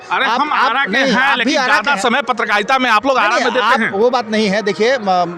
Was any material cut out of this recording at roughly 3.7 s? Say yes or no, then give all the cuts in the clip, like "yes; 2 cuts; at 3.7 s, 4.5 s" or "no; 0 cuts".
no; 0 cuts